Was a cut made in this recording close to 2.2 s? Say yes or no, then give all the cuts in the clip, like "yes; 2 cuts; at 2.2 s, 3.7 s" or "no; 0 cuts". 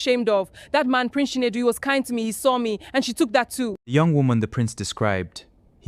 no; 1 cut; at 3.8 s